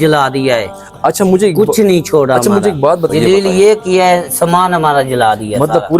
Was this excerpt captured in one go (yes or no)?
no